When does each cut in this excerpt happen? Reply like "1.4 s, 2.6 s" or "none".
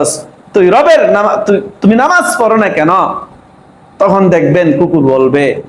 none

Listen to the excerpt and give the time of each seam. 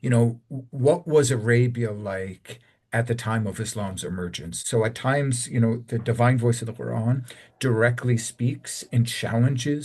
4.5 s

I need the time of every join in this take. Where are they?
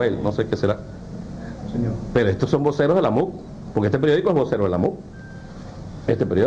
2.2 s

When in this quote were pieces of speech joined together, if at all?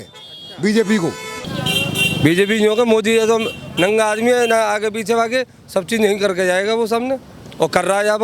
1.5 s

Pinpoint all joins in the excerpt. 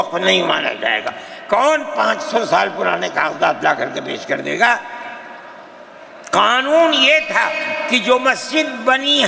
none

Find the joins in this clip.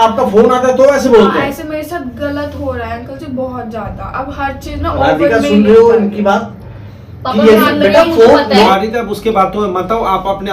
8.7 s

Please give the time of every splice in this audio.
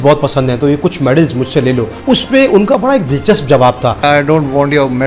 2.0 s, 4.0 s

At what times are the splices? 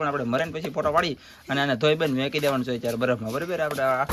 none

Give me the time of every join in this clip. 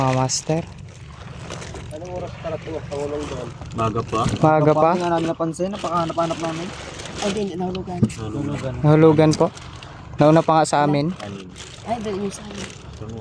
none

